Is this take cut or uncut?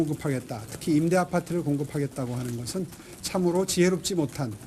uncut